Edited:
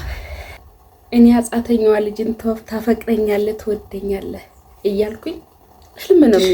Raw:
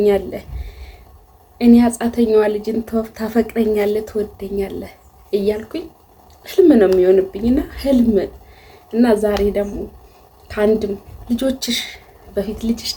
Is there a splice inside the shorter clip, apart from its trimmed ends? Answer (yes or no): no